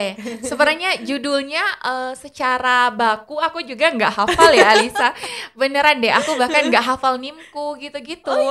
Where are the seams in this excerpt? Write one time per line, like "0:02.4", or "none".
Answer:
none